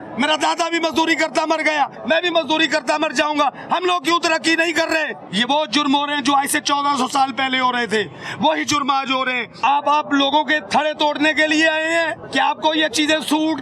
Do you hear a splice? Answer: yes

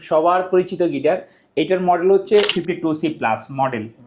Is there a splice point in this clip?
yes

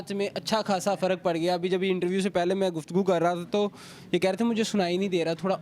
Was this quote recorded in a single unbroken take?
yes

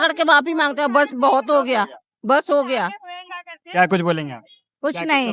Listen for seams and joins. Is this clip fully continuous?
yes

